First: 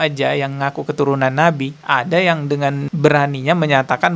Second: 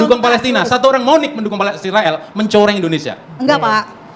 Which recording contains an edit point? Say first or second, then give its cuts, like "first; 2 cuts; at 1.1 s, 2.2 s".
first; 1 cut; at 2.9 s